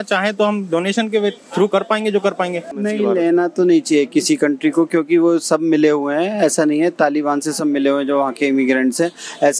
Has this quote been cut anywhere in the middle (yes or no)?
yes